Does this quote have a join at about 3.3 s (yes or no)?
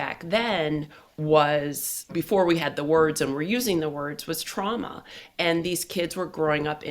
no